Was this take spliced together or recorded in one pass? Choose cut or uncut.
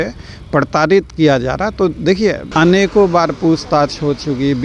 cut